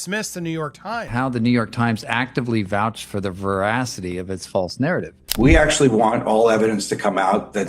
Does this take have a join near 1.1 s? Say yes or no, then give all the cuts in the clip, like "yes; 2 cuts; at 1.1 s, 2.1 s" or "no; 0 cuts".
yes; 1 cut; at 1.1 s